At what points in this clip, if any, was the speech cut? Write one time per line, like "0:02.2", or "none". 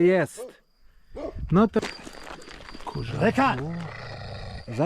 0:01.8